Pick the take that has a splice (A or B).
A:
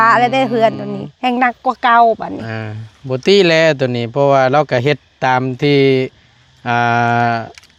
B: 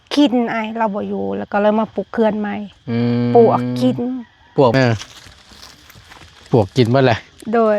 B